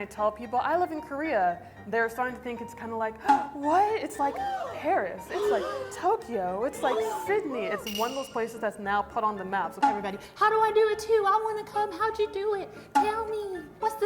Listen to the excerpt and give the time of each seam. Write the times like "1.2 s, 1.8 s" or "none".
9.7 s